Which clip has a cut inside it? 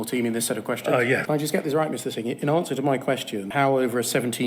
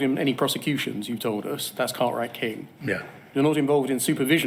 first; 2 cuts; at 1.2 s, 3.4 s

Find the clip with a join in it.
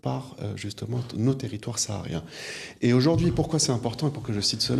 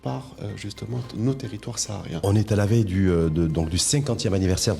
second; 1 cut; at 2.2 s

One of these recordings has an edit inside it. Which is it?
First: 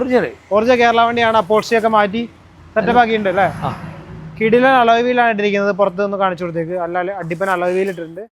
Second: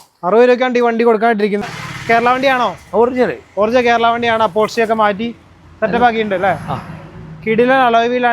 second; 1 cut; at 1.6 s

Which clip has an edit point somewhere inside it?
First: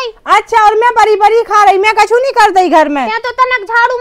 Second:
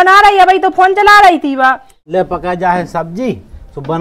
second; 1 cut; at 1.9 s

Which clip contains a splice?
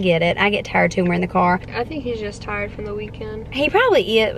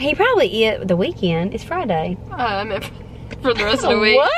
first; 1 cut; at 1.7 s

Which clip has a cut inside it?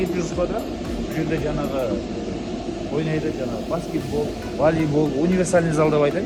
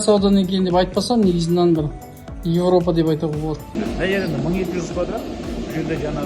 second; 1 cut; at 3.6 s

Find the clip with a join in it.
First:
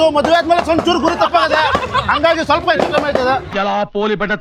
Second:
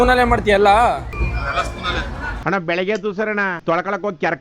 second; 1 cut; at 1.1 s

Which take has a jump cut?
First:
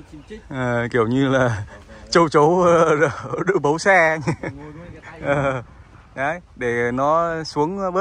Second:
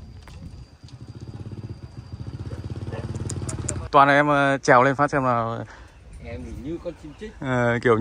second; 1 cut; at 3.8 s

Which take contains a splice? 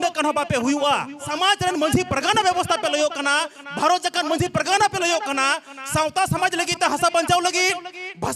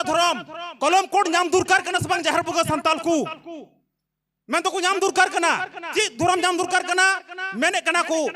first; 1 cut; at 1.2 s

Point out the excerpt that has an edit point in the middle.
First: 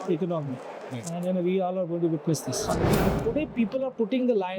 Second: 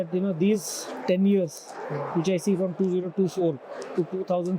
first; 1 cut; at 3.0 s

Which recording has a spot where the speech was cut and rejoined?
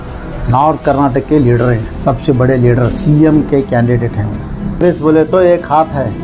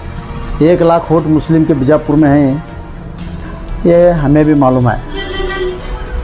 first; 1 cut; at 4.8 s

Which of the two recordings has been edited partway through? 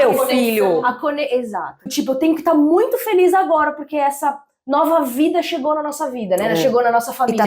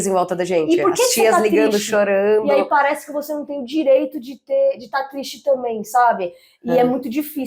first; 1 cut; at 1.8 s

